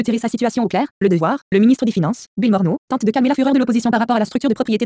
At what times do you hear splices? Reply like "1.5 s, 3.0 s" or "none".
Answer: 0.7 s, 1.8 s